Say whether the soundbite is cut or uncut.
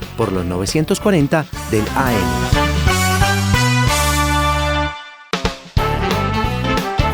cut